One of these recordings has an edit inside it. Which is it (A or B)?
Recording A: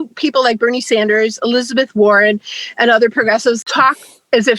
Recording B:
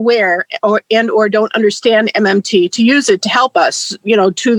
A